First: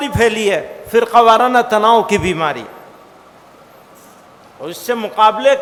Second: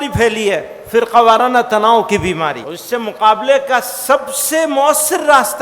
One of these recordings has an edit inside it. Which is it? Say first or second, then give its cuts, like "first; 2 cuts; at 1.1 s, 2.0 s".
second; 1 cut; at 2.7 s